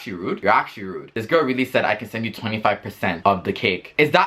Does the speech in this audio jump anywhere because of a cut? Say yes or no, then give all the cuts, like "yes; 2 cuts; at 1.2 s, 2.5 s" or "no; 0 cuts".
no; 0 cuts